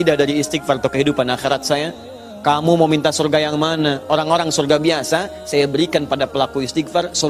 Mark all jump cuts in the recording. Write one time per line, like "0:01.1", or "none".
none